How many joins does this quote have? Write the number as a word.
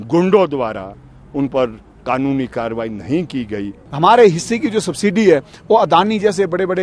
one